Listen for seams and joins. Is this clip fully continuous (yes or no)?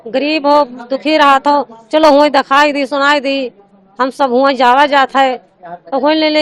yes